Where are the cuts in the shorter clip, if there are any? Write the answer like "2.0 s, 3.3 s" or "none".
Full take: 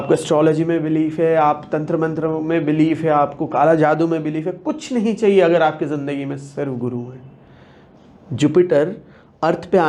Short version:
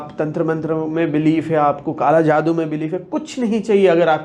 none